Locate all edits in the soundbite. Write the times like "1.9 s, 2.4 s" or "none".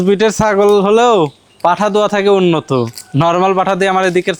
none